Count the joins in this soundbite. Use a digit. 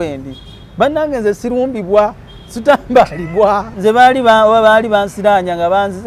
1